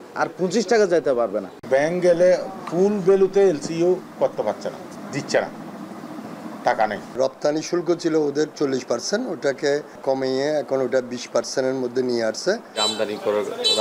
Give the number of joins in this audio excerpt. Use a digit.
5